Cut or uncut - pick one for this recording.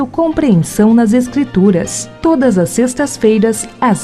uncut